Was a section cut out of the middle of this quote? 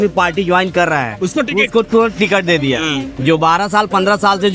no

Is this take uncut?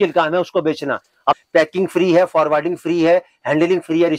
no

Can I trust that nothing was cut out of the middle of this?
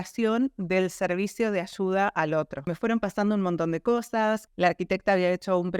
no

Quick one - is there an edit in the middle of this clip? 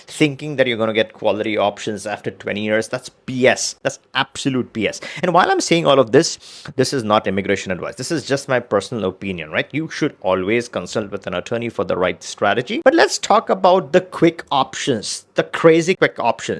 no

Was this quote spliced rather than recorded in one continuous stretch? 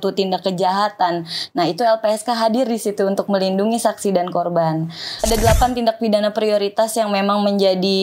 yes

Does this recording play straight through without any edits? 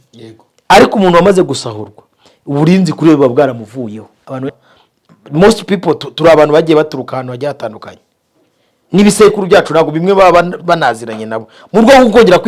no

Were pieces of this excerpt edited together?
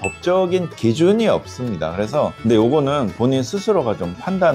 yes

